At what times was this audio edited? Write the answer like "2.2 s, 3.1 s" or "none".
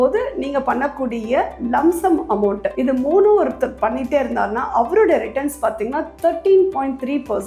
none